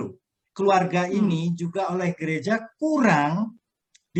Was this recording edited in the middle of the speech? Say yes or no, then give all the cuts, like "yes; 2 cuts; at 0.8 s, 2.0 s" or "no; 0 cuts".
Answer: no; 0 cuts